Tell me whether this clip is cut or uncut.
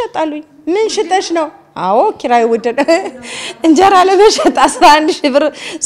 uncut